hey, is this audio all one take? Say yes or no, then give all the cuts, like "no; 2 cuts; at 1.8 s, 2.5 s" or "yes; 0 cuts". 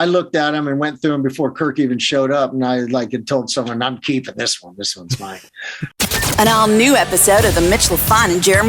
no; 1 cut; at 5.9 s